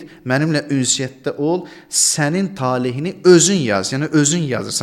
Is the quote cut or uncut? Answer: uncut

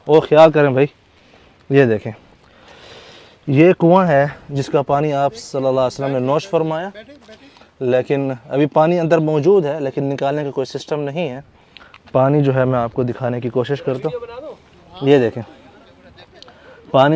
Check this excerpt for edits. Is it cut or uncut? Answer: uncut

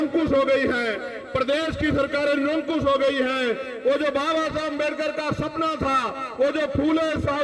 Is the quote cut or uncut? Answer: uncut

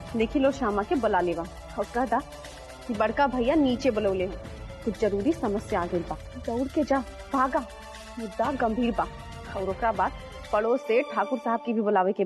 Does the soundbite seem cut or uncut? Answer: uncut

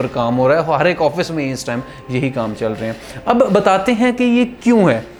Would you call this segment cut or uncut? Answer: uncut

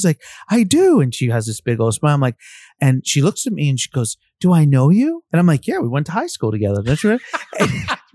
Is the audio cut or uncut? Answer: cut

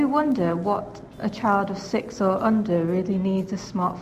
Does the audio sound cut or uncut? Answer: cut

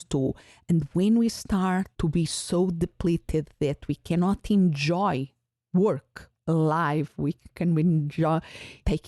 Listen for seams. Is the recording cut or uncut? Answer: cut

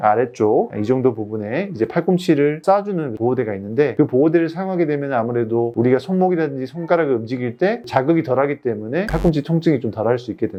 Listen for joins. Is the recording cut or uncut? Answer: uncut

